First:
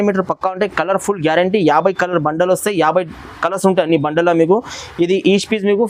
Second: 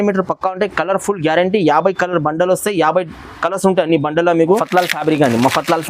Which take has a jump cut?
second; 1 cut; at 4.6 s

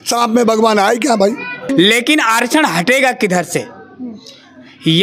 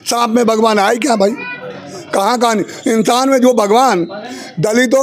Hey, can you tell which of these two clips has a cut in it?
first; 1 cut; at 1.5 s

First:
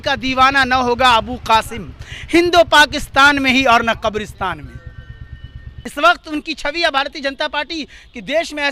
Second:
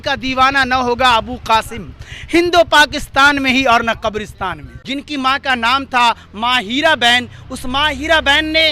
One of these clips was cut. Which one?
second; 1 cut; at 4.7 s

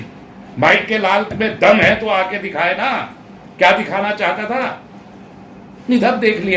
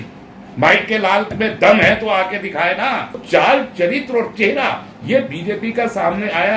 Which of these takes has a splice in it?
second; 1 cut; at 3.2 s

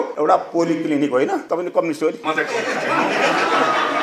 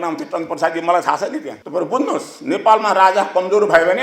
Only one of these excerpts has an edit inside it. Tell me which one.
second; 1 cut; at 1.5 s

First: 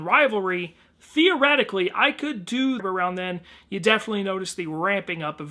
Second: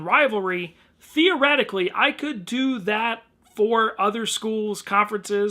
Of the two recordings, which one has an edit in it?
second; 1 cut; at 2.8 s

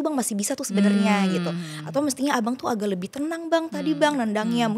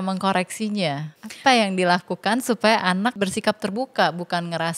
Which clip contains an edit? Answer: second; 2 cuts; at 1.1 s, 3.1 s

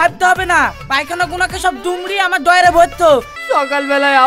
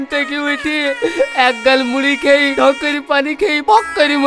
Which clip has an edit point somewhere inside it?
first; 1 cut; at 3.2 s

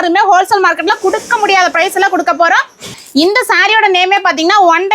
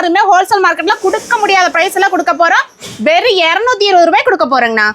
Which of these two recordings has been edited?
first; 1 cut; at 2.9 s

